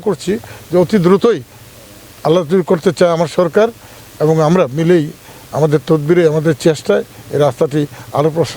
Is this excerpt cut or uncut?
uncut